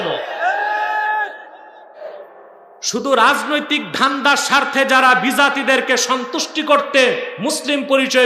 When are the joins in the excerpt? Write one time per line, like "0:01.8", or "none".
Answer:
0:02.0